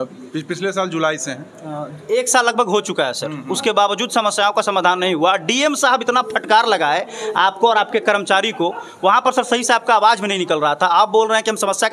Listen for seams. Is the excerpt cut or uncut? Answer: uncut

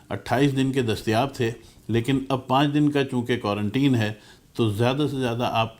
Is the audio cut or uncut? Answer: uncut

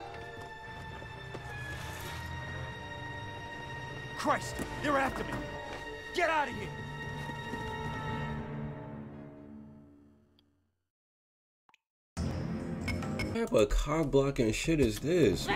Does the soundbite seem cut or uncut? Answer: cut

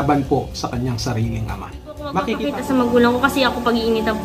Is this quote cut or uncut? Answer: cut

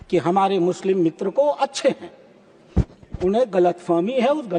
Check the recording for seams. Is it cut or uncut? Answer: uncut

